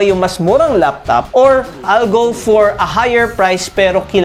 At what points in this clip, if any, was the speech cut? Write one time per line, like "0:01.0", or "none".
none